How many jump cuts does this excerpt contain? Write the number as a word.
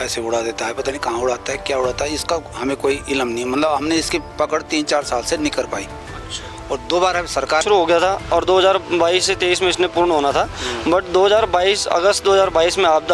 one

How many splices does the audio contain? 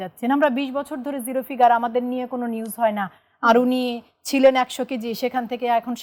zero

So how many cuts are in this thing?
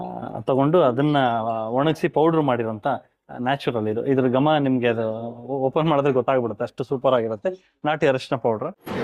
zero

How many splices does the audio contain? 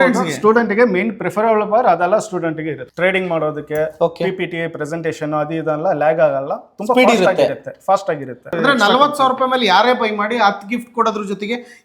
two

